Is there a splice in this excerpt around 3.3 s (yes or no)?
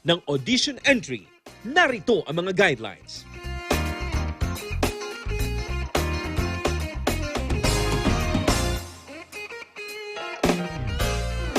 yes